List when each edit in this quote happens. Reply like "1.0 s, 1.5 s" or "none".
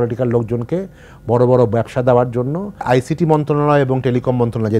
2.8 s